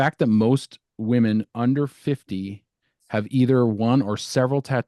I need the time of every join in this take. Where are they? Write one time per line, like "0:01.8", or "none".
none

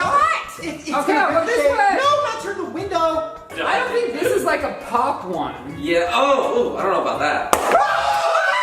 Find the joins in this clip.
0:03.5

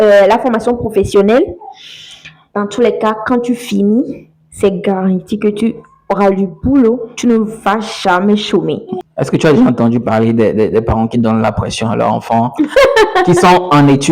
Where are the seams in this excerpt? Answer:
0:09.0

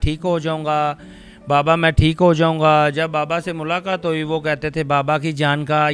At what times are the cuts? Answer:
none

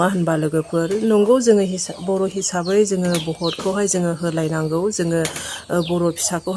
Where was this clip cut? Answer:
none

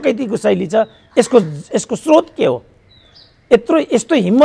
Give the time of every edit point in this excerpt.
none

